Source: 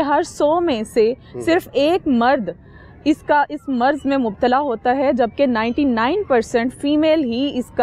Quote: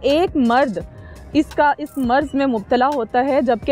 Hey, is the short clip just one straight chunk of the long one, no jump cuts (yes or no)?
yes